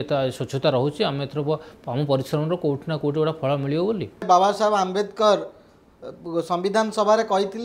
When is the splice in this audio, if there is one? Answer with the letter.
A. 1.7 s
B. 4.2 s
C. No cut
B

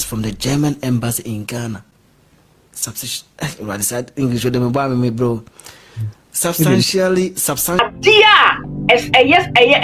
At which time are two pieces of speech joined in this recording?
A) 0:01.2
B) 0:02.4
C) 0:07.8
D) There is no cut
C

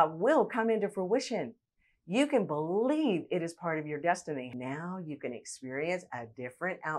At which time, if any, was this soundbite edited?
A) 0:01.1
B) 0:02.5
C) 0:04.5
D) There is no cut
C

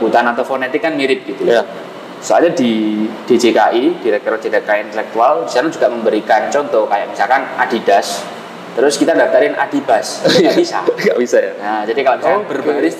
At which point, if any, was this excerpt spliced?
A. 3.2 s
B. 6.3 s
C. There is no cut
C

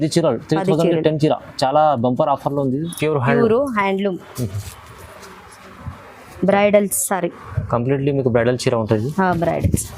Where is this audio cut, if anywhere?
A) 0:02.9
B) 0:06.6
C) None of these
A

